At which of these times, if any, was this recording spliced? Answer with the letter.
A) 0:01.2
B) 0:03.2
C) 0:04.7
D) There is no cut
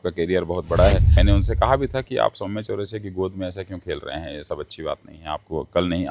A